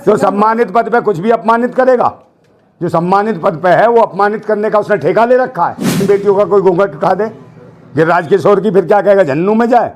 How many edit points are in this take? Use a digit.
1